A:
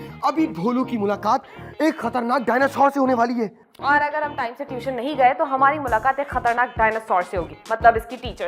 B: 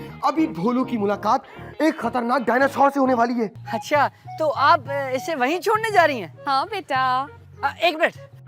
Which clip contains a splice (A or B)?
B